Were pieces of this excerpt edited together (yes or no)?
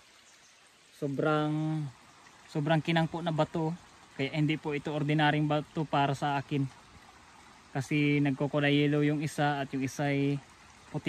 no